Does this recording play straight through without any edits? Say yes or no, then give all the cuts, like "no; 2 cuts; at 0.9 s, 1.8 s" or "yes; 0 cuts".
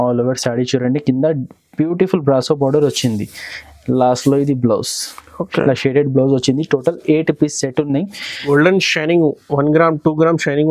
no; 1 cut; at 8.5 s